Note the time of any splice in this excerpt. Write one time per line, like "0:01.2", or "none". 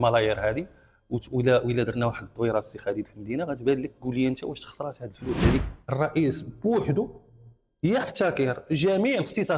0:05.6